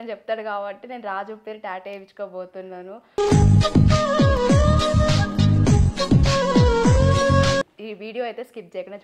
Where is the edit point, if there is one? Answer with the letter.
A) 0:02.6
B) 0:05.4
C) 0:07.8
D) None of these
C